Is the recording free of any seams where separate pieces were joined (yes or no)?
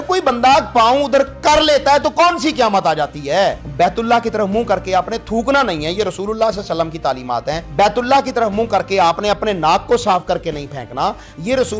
no